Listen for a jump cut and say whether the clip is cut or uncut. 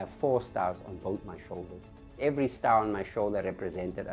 cut